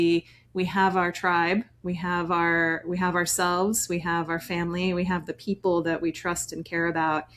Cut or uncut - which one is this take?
uncut